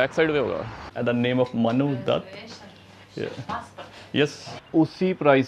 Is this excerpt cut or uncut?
cut